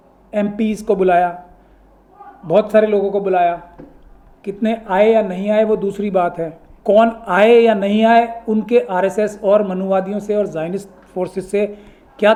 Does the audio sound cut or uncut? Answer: uncut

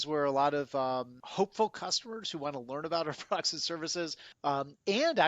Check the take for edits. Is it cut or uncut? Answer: cut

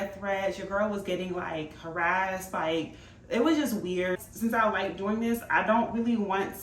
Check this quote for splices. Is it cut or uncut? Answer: cut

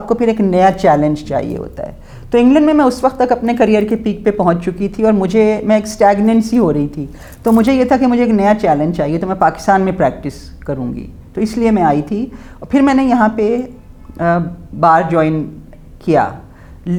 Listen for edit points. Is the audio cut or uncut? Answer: uncut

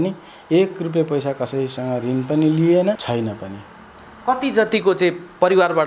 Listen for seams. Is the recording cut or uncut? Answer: uncut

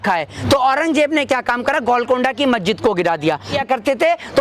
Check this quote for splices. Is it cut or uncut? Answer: cut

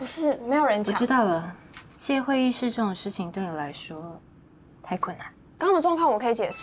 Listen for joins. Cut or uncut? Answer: uncut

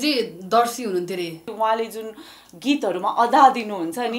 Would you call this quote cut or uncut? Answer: cut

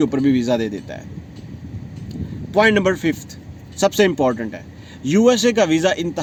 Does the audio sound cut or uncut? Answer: uncut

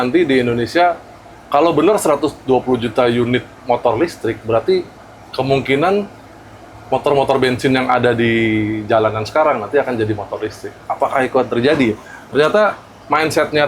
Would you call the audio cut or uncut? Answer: uncut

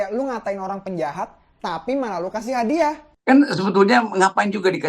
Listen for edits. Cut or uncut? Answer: cut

